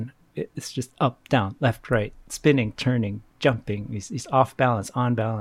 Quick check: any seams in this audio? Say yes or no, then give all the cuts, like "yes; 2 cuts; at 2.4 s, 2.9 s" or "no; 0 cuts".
no; 0 cuts